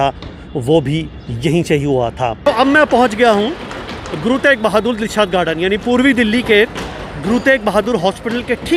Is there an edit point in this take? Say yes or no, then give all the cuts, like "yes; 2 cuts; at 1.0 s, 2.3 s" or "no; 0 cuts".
yes; 1 cut; at 2.5 s